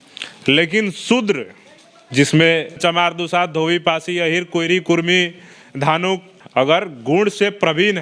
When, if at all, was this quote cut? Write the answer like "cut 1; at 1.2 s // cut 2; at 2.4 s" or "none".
cut 1; at 2.8 s // cut 2; at 6.4 s